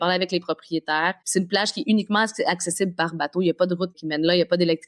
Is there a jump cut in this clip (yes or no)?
yes